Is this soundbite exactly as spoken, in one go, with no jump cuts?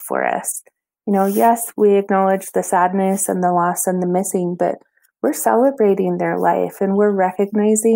no; 1 cut; at 1.7 s

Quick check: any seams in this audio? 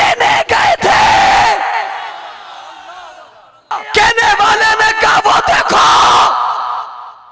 yes; 1 cut; at 3.8 s

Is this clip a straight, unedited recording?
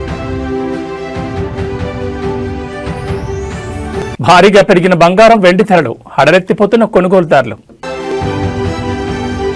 no; 2 cuts; at 4.1 s, 7.9 s

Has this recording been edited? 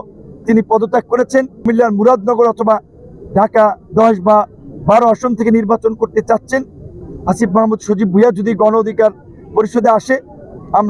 yes; 1 cut; at 1.6 s

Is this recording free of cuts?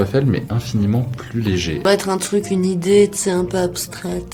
yes; 0 cuts

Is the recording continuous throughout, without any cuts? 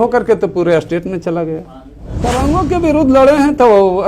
no; 1 cut; at 2.3 s

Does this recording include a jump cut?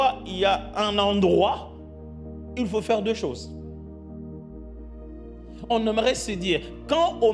no; 0 cuts

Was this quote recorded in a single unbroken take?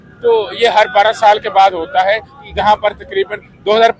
yes; 0 cuts

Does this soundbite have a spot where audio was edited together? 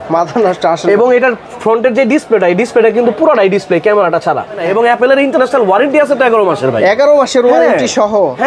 yes; 1 cut; at 4.6 s

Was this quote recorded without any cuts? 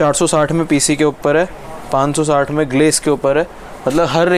yes; 0 cuts

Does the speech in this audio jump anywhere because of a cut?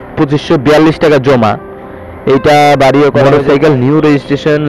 yes; 1 cut; at 3.2 s

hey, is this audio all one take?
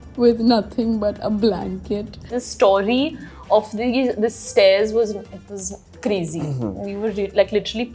no; 1 cut; at 2.4 s

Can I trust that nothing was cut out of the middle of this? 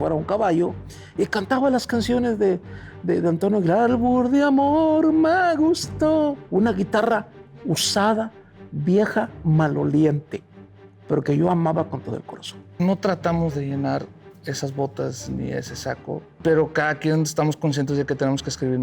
no; 3 cuts; at 6.4 s, 12.8 s, 16.3 s

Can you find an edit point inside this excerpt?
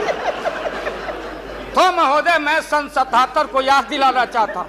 no; 0 cuts

